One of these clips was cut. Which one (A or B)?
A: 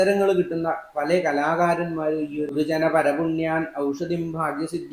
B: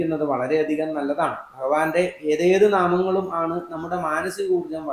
A